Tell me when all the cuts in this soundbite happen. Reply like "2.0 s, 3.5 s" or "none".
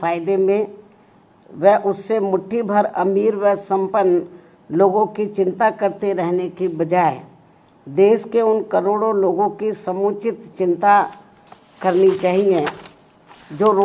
none